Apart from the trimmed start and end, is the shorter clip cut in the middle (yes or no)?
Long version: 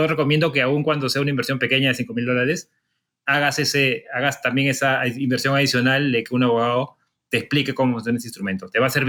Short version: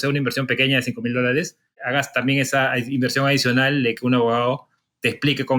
yes